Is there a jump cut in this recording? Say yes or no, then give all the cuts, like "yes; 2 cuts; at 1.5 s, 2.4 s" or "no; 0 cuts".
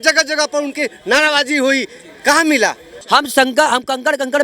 yes; 1 cut; at 2.9 s